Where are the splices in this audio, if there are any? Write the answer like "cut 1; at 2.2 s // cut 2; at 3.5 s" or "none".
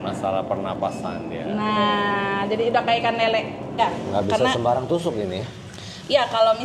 cut 1; at 3.8 s